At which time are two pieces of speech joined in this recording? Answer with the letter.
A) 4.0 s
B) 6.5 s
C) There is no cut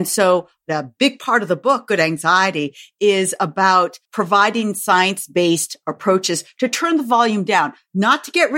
A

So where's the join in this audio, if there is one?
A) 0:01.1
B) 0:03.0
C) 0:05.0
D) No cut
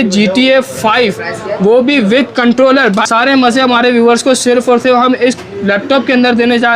B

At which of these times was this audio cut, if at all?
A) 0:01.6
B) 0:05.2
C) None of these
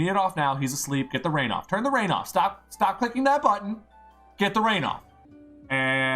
B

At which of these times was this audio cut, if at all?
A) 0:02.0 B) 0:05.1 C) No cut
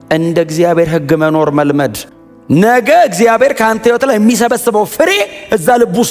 A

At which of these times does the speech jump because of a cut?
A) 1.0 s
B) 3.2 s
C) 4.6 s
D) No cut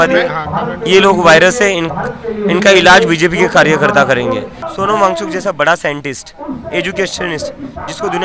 C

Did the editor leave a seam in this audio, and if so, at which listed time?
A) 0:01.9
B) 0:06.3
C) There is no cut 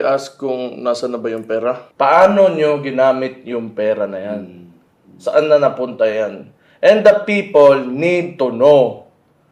A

